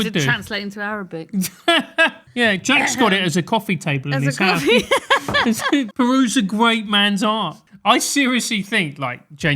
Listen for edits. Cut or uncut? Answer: cut